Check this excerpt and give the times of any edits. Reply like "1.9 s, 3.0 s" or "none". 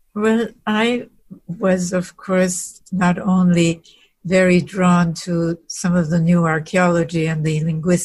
1.2 s